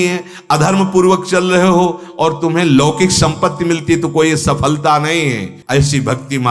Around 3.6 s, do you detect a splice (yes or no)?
no